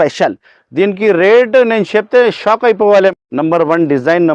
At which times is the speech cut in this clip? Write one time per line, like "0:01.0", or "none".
0:03.1

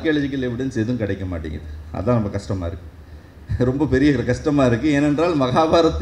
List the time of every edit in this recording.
none

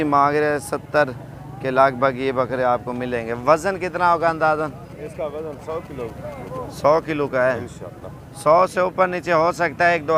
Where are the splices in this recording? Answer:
none

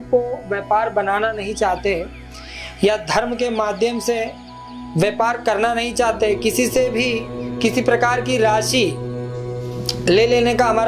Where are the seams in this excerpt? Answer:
none

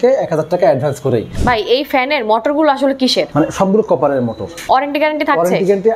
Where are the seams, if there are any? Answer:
0:01.3
0:03.3
0:04.5

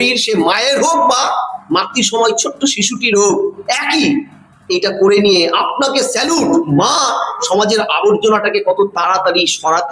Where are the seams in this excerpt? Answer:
0:06.7

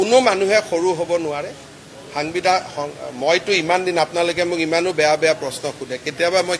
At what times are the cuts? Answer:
none

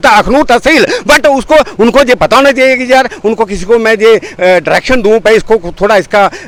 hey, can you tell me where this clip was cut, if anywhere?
none

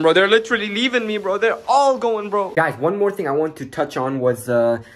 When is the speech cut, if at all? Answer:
none

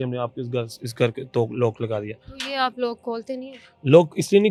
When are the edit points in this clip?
none

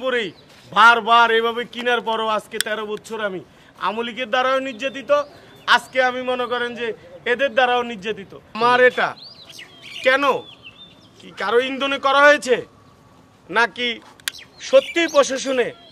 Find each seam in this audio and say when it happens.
0:08.5

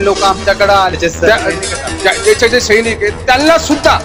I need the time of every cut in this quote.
0:01.0

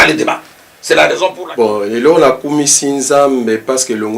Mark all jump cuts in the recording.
0:01.3

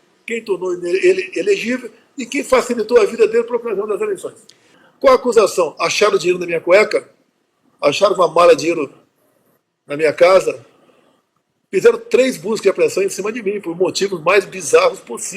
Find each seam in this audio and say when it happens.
0:04.8

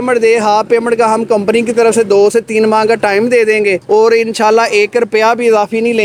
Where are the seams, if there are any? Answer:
none

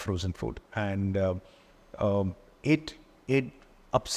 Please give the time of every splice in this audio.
none

